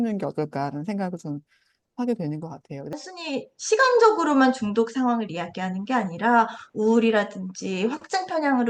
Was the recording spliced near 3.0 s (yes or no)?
yes